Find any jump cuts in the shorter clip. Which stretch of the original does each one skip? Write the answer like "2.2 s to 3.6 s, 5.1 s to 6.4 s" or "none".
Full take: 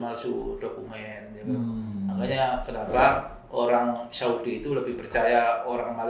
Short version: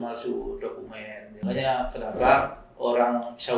1.4 s to 2.1 s